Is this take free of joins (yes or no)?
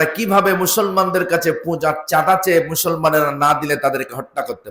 yes